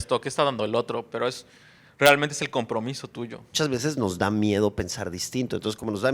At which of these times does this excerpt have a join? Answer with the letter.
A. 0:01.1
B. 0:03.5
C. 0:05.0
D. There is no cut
B